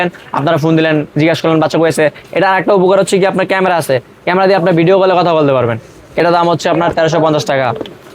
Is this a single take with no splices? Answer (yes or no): no